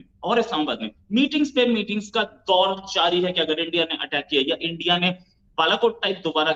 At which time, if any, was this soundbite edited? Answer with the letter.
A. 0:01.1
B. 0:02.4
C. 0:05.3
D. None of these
D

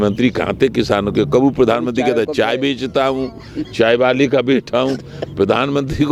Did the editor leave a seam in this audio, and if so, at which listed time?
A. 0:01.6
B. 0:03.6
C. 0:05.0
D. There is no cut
D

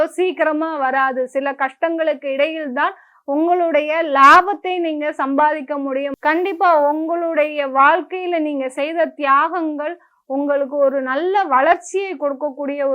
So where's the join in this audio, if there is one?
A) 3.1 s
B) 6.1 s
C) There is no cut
B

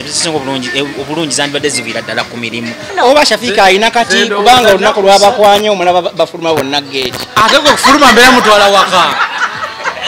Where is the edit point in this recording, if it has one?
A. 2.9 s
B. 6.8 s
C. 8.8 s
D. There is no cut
A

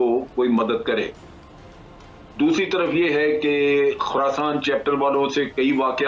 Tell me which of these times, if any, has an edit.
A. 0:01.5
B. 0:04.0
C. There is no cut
C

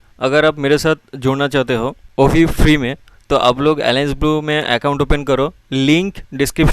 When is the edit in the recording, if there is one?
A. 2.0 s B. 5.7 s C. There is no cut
A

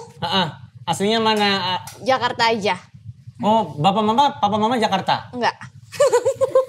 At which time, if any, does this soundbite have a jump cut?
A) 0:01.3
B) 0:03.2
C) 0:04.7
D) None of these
D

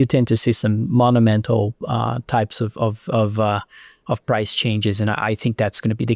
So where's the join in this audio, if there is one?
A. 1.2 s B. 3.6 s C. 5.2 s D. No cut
D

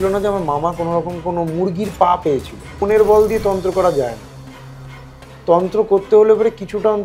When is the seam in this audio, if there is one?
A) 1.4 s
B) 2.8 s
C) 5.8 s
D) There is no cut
B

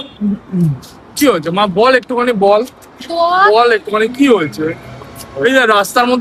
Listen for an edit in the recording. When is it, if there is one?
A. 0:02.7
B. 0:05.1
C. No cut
C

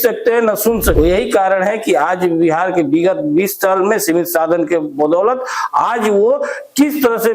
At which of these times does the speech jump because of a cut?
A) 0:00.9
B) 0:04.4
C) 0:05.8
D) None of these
A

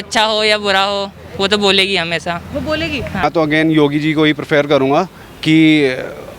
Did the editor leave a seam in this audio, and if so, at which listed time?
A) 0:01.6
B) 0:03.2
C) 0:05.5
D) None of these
B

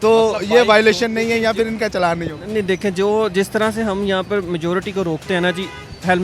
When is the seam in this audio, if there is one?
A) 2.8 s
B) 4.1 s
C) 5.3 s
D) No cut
D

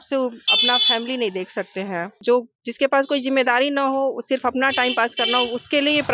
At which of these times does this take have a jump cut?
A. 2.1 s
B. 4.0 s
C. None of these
A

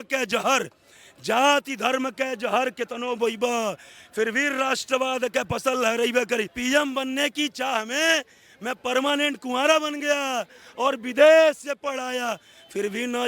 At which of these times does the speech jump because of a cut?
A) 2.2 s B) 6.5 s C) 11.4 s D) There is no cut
B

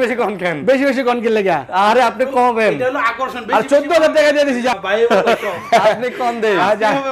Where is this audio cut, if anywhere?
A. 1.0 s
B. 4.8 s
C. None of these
B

